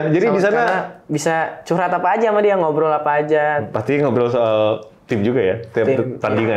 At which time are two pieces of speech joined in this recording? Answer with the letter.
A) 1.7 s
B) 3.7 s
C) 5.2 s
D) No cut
B